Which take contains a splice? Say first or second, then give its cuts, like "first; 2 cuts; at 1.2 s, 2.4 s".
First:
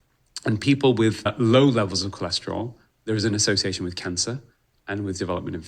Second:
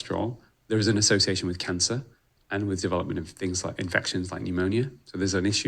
first; 1 cut; at 1.3 s